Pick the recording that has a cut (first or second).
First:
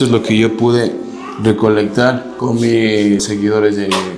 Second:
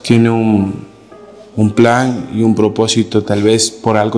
first